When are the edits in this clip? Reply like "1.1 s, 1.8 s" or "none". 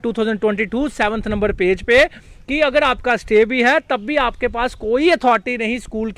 none